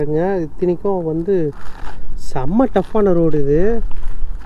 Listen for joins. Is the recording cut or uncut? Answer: uncut